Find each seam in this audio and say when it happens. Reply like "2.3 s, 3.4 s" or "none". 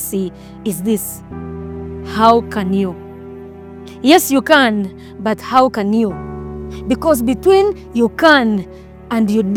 none